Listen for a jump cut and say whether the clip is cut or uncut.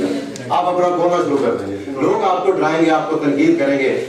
cut